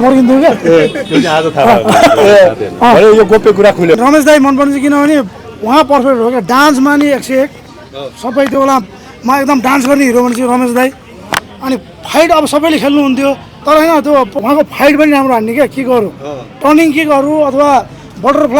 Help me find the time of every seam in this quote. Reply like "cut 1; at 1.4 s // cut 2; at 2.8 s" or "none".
cut 1; at 4.0 s // cut 2; at 13.5 s // cut 3; at 14.3 s